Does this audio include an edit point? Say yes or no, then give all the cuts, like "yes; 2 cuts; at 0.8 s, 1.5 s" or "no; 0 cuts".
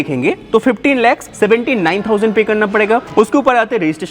yes; 2 cuts; at 1.3 s, 3.1 s